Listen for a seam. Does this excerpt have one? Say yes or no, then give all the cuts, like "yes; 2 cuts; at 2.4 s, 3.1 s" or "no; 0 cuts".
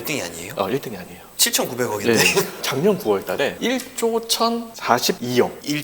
yes; 1 cut; at 3.5 s